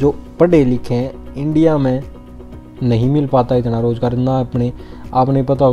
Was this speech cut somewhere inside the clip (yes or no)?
no